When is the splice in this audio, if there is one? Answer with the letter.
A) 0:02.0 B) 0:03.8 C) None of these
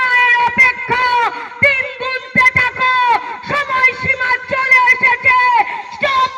C